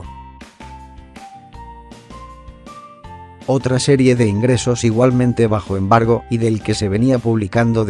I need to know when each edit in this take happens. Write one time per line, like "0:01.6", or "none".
0:02.5